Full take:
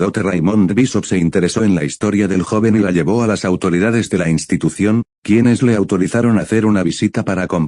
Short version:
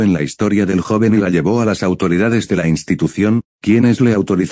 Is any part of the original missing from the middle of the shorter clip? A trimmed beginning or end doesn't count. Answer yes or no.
no